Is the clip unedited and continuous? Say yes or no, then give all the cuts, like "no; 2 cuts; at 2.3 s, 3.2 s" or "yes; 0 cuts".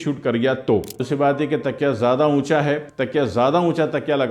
no; 1 cut; at 1.0 s